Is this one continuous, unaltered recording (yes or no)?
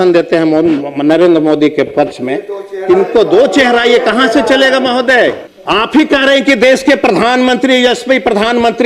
no